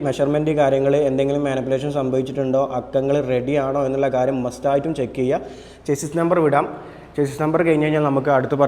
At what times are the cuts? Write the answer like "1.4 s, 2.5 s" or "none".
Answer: none